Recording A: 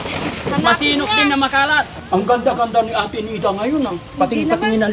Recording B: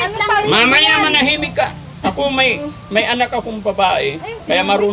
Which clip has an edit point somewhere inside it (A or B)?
A